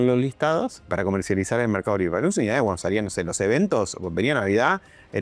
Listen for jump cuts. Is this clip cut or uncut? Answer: cut